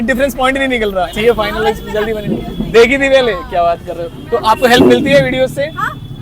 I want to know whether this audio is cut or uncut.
cut